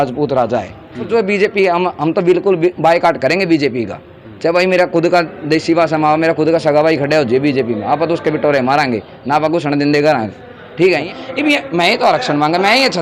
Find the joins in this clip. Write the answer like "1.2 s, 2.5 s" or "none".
1.1 s, 11.0 s

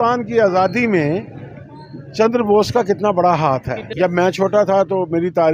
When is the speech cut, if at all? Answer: 3.8 s

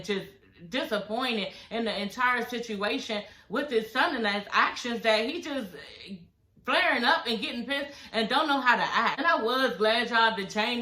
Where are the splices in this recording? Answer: 9.2 s

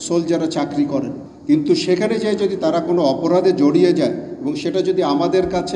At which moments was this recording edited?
1.2 s

